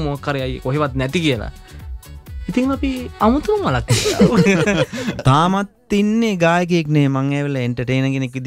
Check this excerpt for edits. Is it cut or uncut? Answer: cut